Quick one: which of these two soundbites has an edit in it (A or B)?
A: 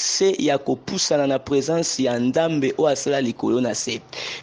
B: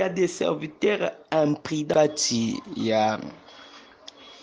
B